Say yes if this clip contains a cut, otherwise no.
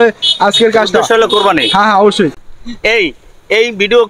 yes